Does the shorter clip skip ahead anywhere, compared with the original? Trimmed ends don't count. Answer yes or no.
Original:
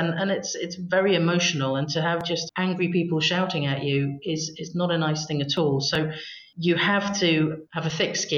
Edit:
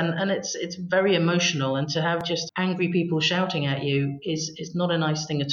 no